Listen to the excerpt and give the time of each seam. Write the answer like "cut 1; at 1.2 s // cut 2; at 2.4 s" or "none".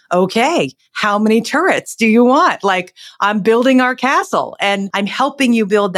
cut 1; at 4.9 s